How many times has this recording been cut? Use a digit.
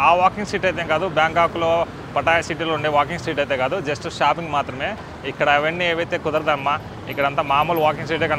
0